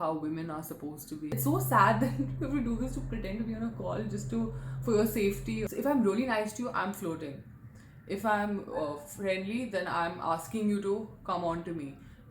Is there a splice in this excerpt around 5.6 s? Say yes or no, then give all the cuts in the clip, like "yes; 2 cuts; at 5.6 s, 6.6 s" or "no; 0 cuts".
yes; 2 cuts; at 1.3 s, 5.6 s